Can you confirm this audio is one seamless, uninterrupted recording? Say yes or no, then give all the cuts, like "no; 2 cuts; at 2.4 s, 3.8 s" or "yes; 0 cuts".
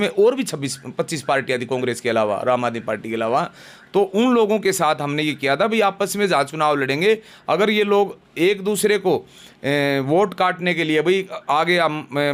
yes; 0 cuts